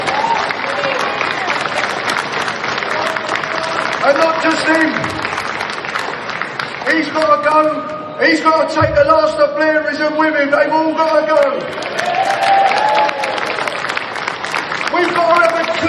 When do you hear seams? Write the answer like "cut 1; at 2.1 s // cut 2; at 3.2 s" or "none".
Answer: none